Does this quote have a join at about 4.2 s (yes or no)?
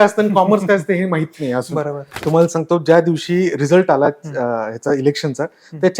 no